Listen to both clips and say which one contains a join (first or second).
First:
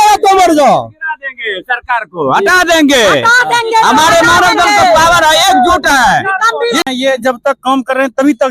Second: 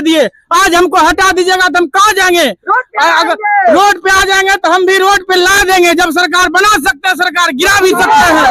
first